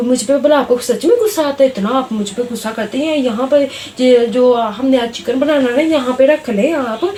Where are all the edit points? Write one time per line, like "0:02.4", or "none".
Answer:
none